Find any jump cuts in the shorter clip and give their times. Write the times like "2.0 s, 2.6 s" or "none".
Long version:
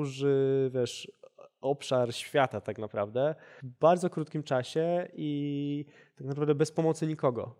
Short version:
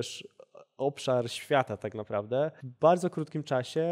2.6 s